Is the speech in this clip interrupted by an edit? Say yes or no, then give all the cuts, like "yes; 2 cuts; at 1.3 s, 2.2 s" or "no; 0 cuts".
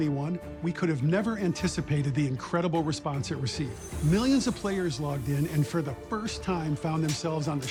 no; 0 cuts